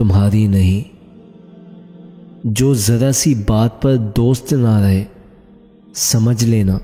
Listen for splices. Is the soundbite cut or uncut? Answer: uncut